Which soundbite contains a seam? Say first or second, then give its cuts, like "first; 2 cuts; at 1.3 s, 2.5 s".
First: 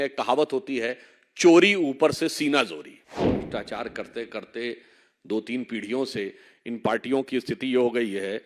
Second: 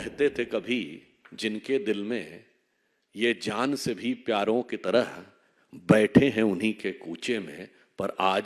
first; 1 cut; at 3.3 s